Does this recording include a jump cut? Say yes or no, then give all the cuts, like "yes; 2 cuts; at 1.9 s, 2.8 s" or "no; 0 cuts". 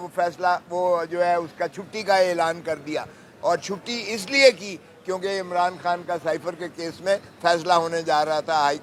no; 0 cuts